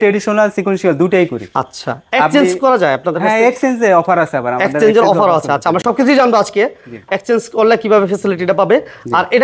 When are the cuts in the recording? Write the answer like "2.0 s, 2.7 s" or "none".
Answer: none